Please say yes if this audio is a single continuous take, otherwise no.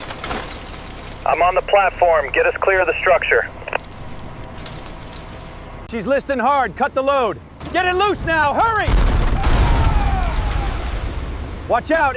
no